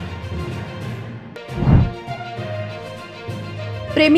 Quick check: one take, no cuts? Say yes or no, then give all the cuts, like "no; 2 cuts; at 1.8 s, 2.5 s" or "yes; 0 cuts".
no; 1 cut; at 1.2 s